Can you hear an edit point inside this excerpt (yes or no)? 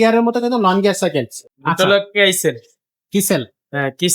yes